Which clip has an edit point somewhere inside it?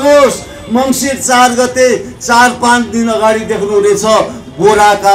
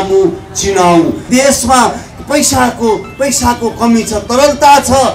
second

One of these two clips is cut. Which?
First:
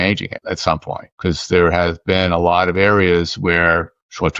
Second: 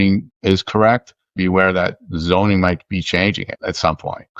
second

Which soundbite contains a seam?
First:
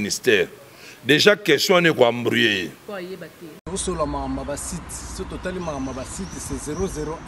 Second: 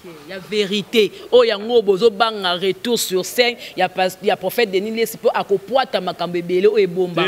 first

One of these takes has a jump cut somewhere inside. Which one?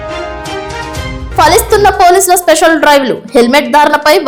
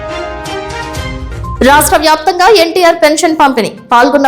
second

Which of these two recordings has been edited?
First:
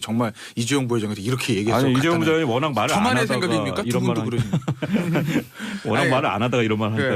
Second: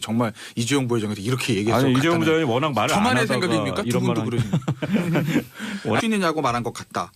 first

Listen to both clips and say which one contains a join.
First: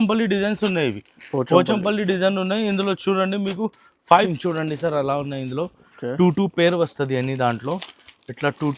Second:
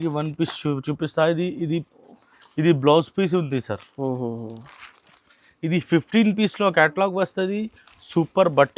first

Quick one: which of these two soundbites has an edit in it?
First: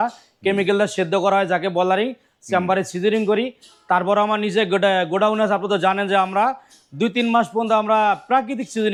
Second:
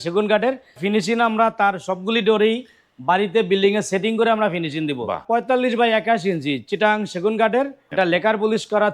second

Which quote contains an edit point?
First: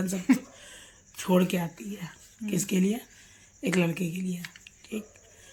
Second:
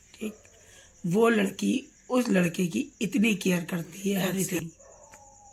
second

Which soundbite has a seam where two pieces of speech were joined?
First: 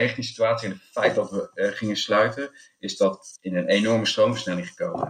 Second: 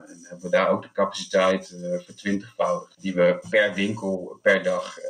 second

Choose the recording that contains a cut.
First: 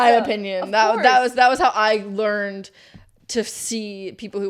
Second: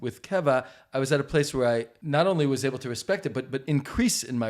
second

